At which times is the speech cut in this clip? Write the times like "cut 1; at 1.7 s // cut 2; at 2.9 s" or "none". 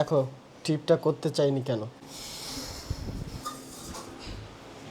cut 1; at 2.0 s